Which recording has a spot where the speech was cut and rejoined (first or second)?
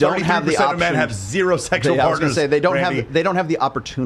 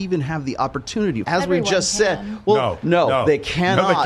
second